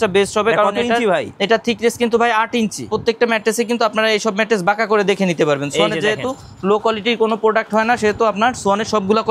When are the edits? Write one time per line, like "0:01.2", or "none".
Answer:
0:02.9